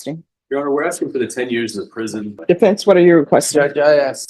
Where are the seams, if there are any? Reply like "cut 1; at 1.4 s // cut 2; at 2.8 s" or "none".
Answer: cut 1; at 2.4 s

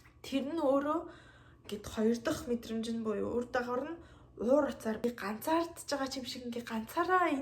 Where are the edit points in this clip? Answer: cut 1; at 5.0 s

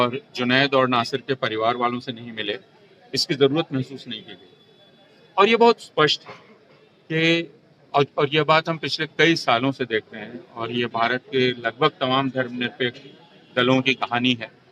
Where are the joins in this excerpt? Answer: none

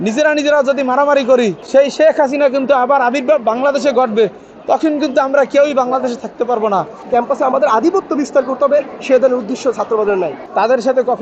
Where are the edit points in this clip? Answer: cut 1; at 1.6 s // cut 2; at 7.0 s // cut 3; at 10.4 s

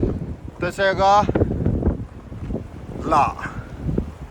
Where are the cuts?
none

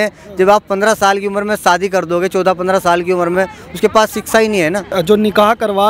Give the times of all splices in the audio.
cut 1; at 3.3 s // cut 2; at 5.0 s

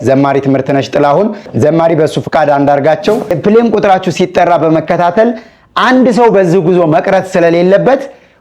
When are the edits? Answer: cut 1; at 3.4 s

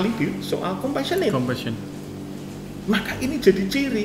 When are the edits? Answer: none

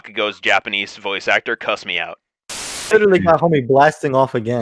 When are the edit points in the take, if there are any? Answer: cut 1; at 2.9 s

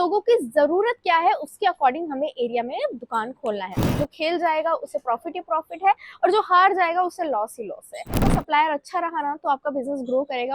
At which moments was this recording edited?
cut 1; at 3.8 s // cut 2; at 8.2 s

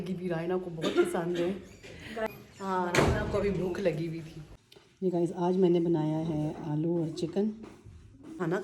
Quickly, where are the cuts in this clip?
none

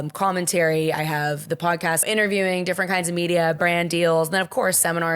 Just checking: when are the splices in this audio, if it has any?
cut 1; at 2.0 s

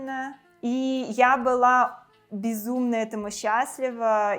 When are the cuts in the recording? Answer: none

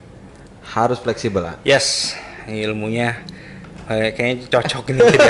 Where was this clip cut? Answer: none

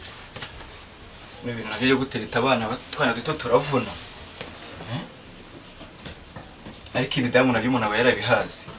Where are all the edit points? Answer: none

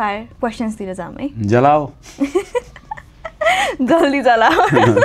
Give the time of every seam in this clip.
none

